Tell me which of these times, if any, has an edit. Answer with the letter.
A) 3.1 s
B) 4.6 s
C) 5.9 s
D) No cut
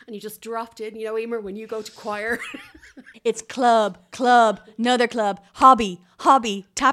A